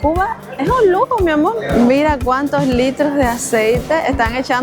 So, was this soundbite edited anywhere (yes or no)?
yes